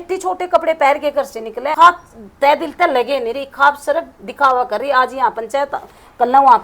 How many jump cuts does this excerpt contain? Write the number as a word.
one